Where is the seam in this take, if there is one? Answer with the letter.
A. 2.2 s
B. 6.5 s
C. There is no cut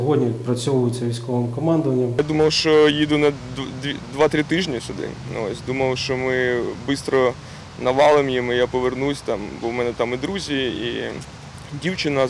A